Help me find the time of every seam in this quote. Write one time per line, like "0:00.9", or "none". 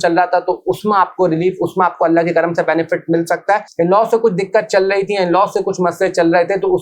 0:03.7